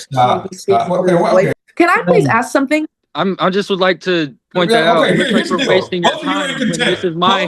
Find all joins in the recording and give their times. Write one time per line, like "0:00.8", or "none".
0:01.6
0:03.0